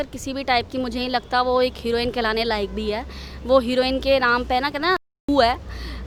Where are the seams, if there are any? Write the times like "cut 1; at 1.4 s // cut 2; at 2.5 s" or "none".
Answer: none